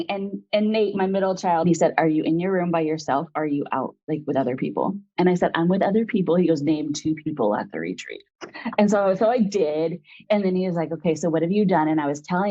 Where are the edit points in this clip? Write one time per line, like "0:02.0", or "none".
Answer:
0:01.7